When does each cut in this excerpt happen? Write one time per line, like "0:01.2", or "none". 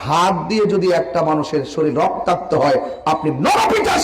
none